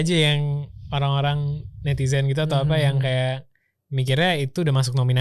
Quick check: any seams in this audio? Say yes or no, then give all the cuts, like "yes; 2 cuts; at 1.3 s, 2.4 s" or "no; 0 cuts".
no; 0 cuts